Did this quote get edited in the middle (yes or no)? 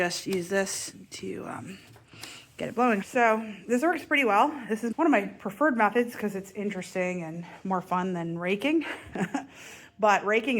yes